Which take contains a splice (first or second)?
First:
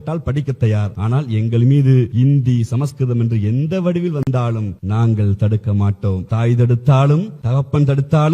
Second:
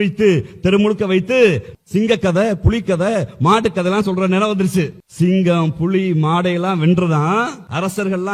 first